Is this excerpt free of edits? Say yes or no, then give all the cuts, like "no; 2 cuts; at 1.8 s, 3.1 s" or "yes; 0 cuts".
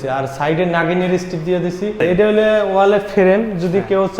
no; 1 cut; at 2.0 s